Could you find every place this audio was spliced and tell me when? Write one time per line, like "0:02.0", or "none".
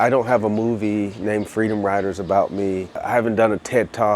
0:03.0